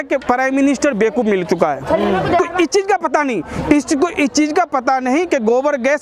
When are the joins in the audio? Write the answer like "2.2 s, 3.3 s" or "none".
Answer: 2.4 s